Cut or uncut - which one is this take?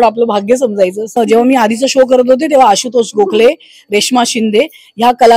cut